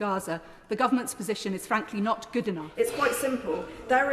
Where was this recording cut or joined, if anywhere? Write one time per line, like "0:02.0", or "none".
0:02.7